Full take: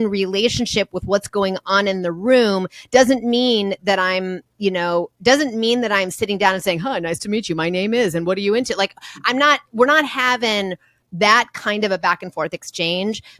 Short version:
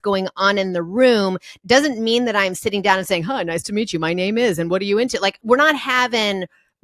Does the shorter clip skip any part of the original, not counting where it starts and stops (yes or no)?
yes